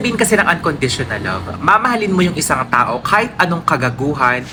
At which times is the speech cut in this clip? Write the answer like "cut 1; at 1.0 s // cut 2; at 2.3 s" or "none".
none